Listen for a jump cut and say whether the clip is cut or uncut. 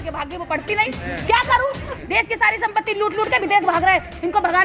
cut